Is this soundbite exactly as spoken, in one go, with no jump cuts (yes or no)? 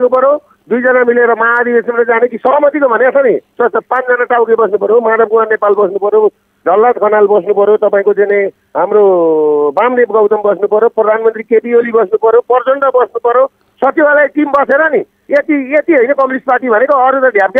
yes